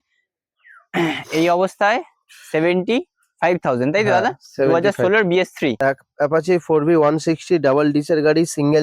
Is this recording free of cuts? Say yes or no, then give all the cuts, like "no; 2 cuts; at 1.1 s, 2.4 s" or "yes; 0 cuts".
no; 1 cut; at 5.8 s